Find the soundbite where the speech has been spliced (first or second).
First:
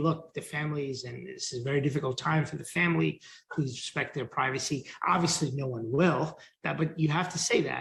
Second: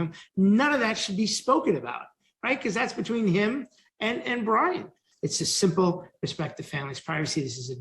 second